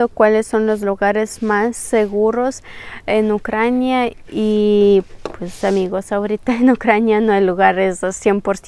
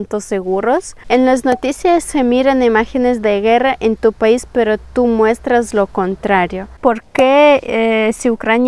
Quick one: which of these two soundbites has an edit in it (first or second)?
second